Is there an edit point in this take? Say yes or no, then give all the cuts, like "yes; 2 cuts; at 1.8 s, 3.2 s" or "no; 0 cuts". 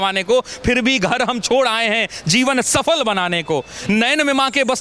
no; 0 cuts